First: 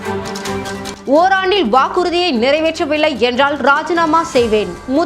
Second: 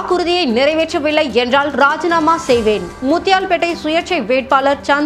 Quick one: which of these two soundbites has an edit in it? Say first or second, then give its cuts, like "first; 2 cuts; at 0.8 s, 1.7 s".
first; 1 cut; at 0.9 s